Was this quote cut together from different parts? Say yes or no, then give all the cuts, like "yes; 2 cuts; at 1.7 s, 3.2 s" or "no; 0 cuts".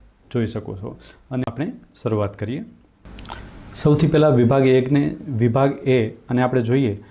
yes; 1 cut; at 1.4 s